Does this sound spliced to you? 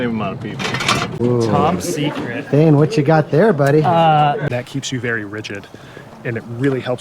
yes; 2 cuts; at 1.2 s, 4.4 s

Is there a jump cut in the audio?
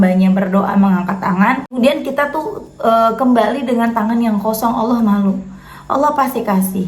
yes; 1 cut; at 1.7 s

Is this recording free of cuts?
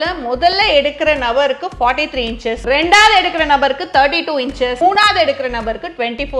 no; 2 cuts; at 2.6 s, 4.8 s

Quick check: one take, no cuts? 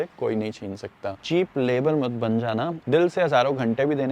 no; 2 cuts; at 1.2 s, 2.8 s

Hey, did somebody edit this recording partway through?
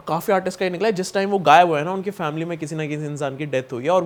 no; 0 cuts

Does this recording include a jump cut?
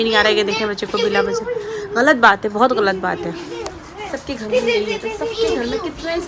no; 0 cuts

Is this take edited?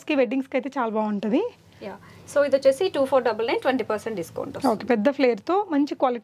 no; 0 cuts

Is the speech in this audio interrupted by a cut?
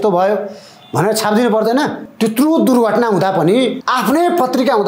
yes; 2 cuts; at 2.0 s, 3.8 s

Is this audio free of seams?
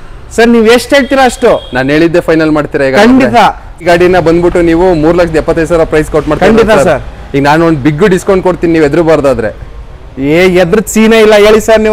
yes; 0 cuts

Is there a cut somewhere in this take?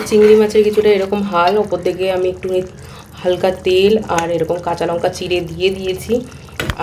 no; 0 cuts

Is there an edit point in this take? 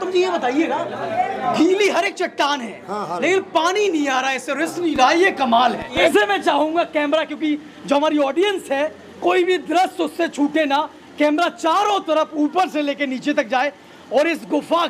yes; 1 cut; at 6.1 s

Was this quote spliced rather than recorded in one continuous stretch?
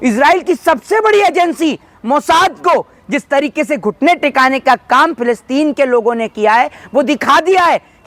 no; 0 cuts

